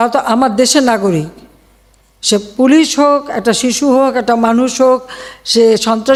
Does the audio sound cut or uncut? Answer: uncut